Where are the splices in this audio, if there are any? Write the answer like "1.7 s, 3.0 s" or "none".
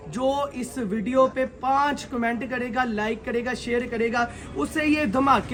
none